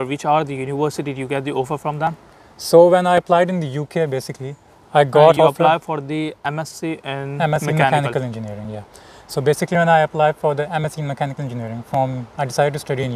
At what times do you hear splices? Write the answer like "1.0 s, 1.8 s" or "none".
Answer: none